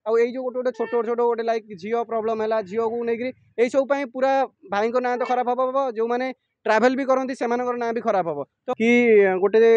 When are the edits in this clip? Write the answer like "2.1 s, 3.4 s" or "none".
8.6 s